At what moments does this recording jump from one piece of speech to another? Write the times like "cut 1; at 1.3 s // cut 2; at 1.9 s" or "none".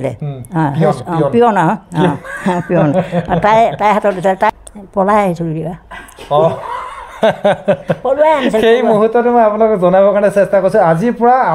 cut 1; at 4.5 s